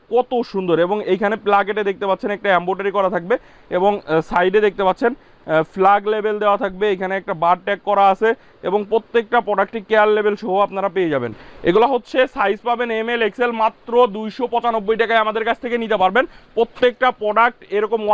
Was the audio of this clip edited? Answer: no; 0 cuts

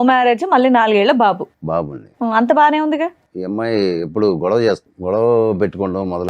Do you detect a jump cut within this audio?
yes; 2 cuts; at 3.3 s, 4.9 s

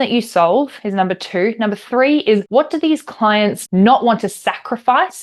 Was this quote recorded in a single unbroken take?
no; 2 cuts; at 2.4 s, 3.6 s

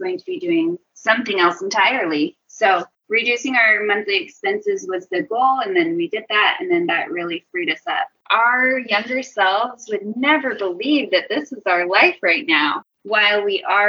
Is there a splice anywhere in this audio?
yes; 3 cuts; at 2.9 s, 8.2 s, 12.9 s

